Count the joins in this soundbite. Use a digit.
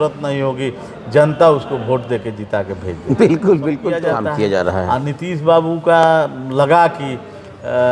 1